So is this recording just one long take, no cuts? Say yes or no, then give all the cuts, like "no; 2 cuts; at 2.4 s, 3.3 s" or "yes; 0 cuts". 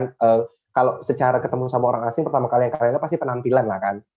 yes; 0 cuts